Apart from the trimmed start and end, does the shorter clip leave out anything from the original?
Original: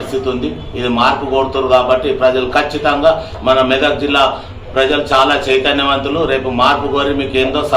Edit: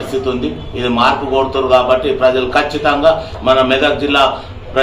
no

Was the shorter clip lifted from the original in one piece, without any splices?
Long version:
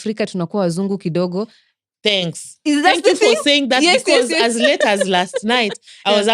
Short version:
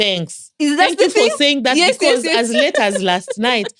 yes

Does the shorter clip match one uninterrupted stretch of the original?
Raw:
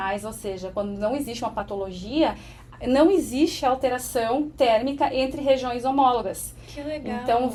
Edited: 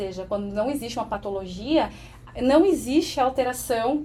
yes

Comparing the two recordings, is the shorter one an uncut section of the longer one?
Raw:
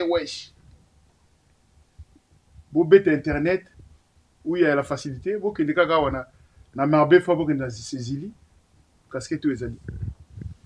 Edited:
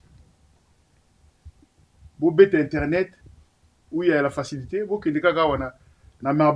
yes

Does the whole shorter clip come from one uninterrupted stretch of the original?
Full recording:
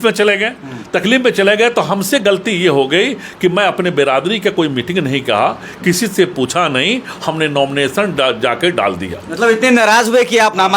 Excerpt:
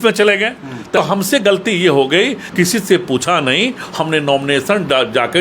no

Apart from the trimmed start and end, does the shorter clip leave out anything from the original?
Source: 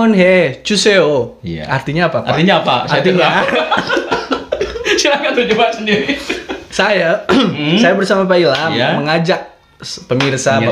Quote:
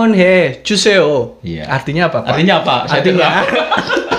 no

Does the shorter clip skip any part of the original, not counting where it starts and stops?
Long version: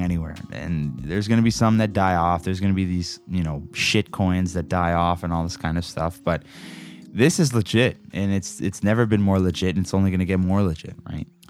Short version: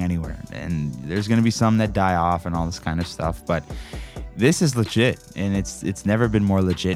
yes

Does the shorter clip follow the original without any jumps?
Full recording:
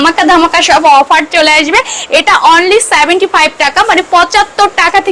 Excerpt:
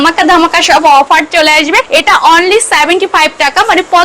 no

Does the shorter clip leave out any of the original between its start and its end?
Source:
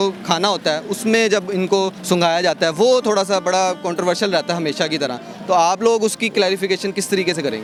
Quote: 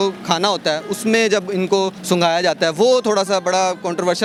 no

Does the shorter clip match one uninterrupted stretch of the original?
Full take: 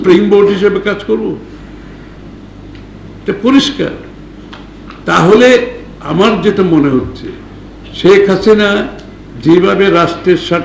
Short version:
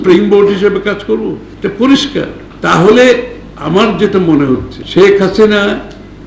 no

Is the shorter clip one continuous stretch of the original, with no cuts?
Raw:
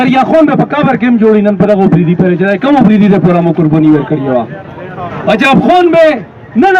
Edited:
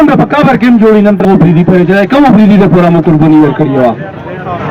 no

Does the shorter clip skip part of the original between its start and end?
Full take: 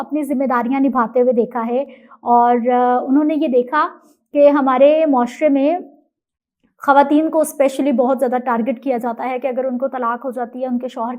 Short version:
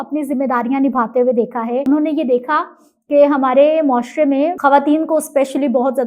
yes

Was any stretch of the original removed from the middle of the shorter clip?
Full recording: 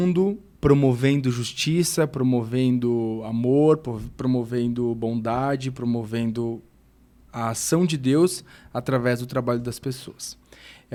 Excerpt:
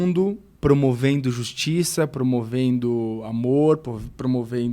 no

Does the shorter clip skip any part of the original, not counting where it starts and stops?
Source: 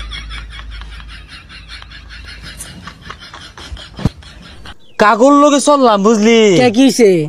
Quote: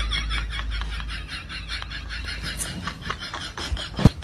no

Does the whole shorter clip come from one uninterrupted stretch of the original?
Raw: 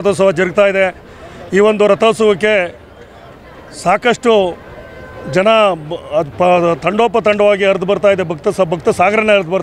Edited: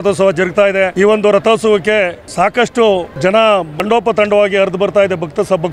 no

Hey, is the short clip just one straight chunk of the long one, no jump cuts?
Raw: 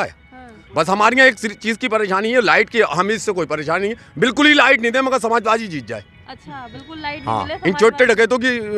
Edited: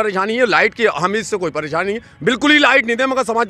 yes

